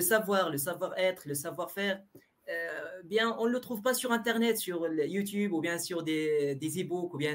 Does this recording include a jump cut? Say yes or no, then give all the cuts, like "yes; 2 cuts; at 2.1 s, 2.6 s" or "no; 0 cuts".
no; 0 cuts